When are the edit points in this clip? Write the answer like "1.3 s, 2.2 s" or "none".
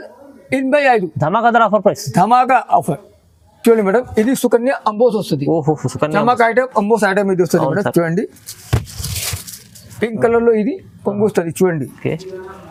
none